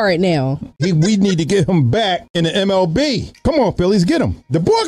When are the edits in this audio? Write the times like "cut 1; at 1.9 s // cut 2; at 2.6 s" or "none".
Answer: cut 1; at 2.3 s // cut 2; at 3.3 s